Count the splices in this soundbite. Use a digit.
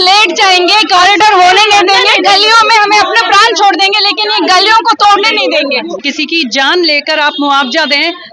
1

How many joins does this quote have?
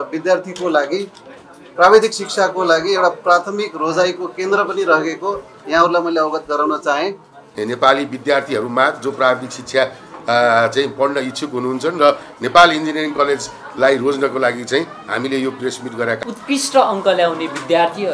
2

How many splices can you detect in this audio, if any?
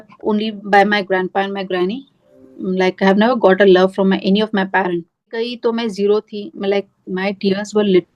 1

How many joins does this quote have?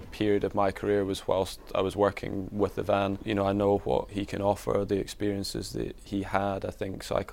3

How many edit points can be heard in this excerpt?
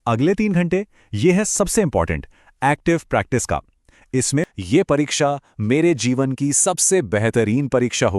1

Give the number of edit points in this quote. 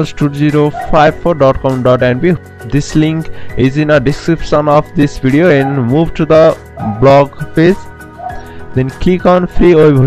0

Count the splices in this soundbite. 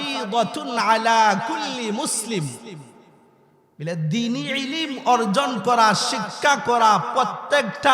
0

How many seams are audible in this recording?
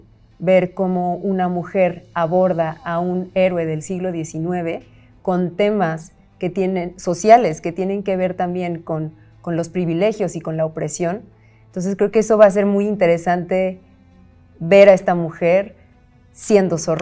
0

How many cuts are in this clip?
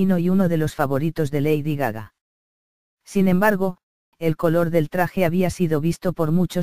1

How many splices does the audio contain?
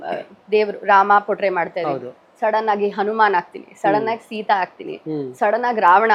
0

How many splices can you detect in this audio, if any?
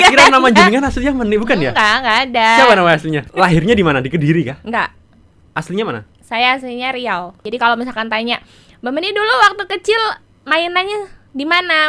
2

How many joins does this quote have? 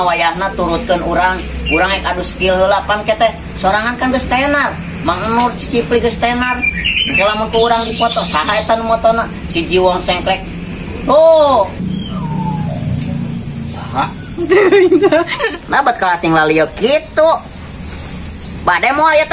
2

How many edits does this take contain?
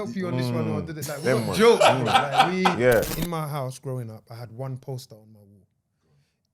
1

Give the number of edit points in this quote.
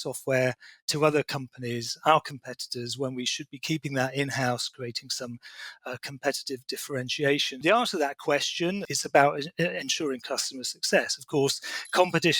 2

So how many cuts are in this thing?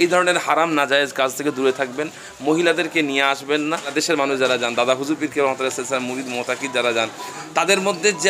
1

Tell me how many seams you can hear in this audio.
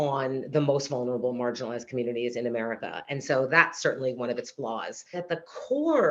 1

